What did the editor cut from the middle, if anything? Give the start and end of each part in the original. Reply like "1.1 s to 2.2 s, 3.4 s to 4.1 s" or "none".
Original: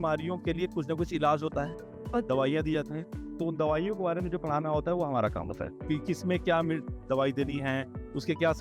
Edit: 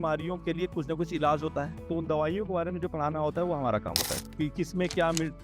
1.8 s to 3.3 s